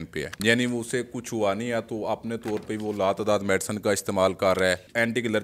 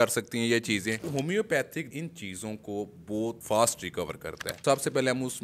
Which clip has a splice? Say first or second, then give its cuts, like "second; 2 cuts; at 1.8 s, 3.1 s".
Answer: second; 4 cuts; at 1.0 s, 1.9 s, 3.4 s, 4.6 s